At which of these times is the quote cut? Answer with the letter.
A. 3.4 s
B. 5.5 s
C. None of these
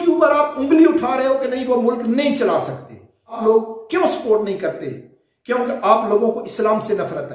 A